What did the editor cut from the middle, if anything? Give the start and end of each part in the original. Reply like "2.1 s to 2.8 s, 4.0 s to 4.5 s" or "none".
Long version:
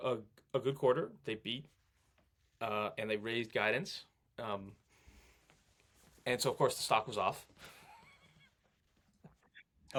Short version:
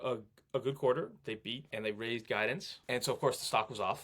1.7 s to 2.9 s, 4.0 s to 6.1 s